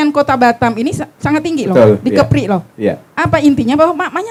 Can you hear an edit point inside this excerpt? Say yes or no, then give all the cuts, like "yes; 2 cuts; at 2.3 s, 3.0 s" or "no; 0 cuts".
no; 0 cuts